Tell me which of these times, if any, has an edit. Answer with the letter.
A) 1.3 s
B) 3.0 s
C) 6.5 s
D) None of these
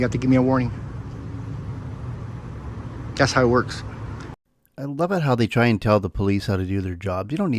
D